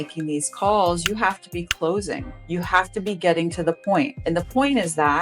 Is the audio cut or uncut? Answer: cut